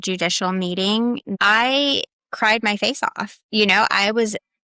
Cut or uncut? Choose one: cut